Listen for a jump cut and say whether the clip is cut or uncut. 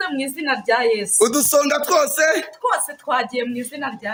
uncut